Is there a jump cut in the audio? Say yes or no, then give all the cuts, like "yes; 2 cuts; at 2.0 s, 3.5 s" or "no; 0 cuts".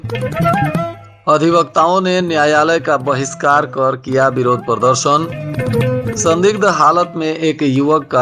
no; 0 cuts